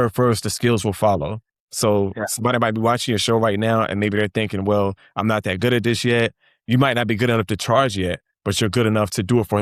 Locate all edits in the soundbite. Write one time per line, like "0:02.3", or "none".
none